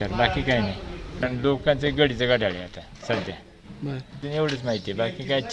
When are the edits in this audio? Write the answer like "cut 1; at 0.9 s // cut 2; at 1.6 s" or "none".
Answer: cut 1; at 1.2 s // cut 2; at 4.2 s